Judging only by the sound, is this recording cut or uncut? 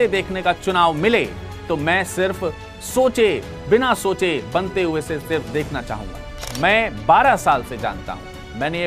cut